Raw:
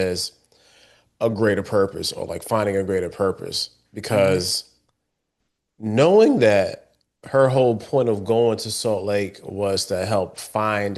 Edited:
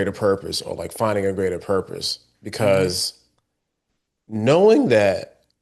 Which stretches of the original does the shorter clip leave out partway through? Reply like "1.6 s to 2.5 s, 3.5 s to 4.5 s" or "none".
none